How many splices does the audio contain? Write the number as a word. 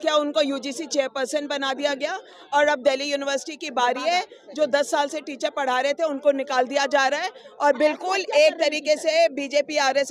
zero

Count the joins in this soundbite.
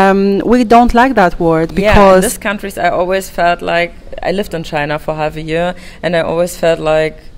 one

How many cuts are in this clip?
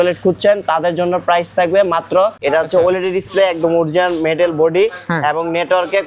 one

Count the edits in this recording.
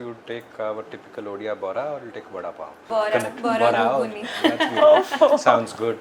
one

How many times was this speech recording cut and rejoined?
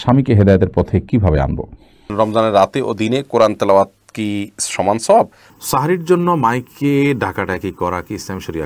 two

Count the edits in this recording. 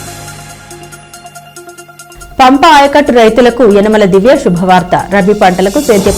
one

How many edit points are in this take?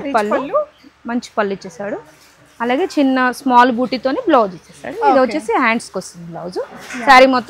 zero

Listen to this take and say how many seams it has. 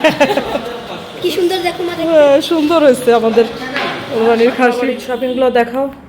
one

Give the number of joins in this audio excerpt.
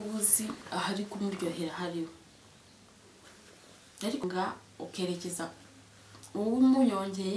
one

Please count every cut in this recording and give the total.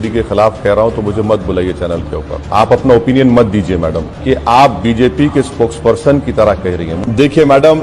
three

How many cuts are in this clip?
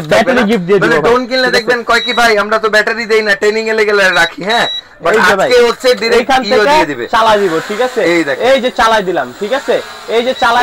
zero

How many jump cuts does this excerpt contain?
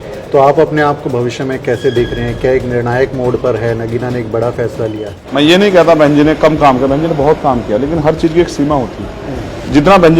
one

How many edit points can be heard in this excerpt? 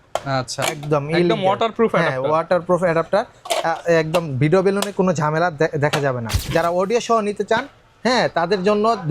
one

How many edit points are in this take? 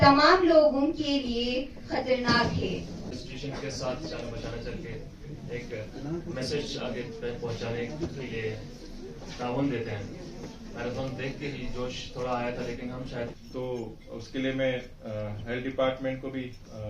two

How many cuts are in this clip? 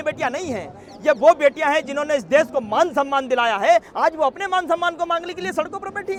zero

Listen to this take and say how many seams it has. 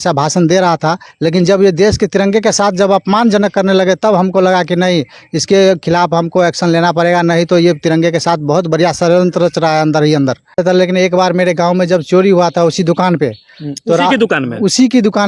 two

